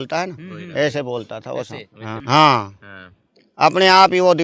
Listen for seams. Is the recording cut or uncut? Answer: cut